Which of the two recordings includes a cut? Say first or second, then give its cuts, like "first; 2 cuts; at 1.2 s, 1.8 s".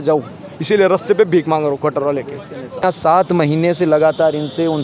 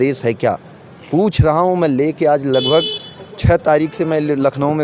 first; 1 cut; at 2.8 s